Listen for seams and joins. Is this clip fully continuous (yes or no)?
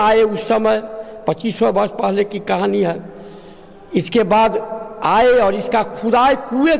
yes